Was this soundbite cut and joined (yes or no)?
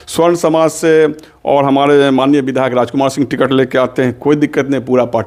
no